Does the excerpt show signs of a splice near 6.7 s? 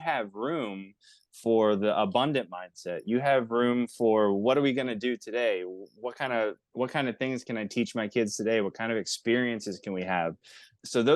yes; 1 cut; at 6.7 s

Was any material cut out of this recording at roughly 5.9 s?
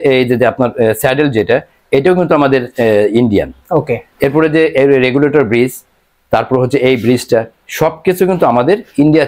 no; 0 cuts

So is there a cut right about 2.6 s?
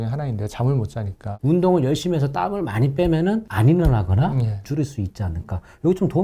no; 2 cuts; at 1.2 s, 4.6 s

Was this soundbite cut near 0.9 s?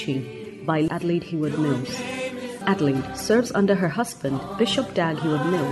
yes; 2 cuts; at 0.9 s, 2.6 s

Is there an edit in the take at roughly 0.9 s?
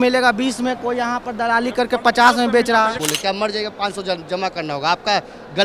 no; 1 cut; at 3.0 s

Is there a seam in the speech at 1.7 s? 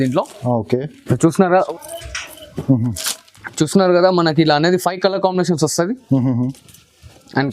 yes; 1 cut; at 1.7 s

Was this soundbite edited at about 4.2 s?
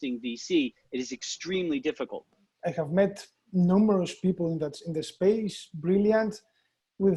no; 1 cut; at 2.3 s

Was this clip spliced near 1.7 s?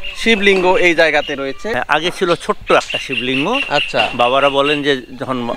yes; 1 cut; at 1.7 s

